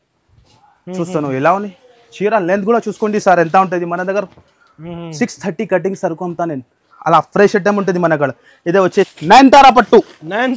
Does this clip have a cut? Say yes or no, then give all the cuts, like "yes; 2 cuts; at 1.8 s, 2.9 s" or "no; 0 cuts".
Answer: yes; 1 cut; at 9.1 s